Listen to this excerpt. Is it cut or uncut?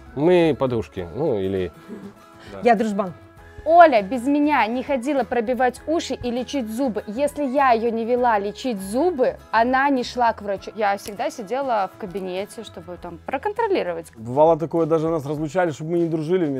cut